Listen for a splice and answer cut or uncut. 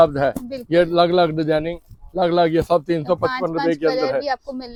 uncut